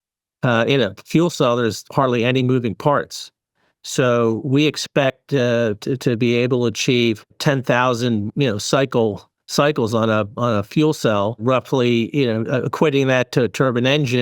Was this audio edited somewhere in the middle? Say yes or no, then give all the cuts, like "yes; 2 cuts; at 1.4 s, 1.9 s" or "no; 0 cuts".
yes; 2 cuts; at 7.4 s, 11.4 s